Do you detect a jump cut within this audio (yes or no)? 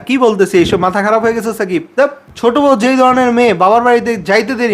yes